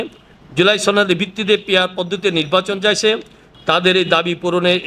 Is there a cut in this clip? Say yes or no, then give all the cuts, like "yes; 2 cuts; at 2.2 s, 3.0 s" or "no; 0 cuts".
yes; 1 cut; at 3.4 s